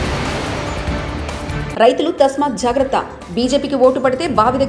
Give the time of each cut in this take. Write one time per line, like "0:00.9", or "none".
0:01.6

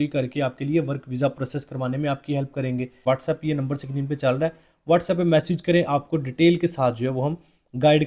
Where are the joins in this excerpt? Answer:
0:03.0

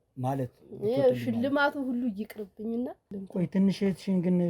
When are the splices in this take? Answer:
0:03.1

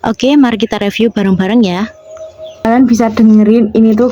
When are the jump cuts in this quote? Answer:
0:02.5

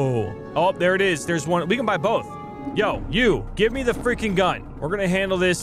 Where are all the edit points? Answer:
0:02.6
0:04.7

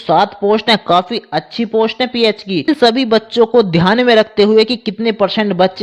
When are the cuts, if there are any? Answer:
0:02.7

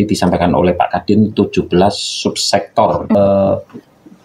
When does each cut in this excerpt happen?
0:03.2

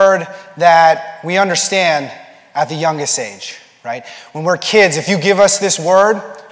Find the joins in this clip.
0:05.4

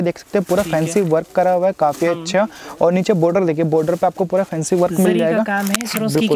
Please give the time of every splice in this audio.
none

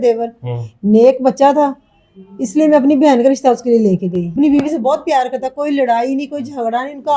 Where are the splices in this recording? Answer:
none

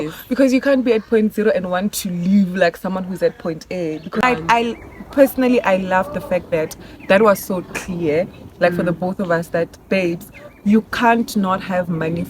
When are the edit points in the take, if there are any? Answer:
0:04.2

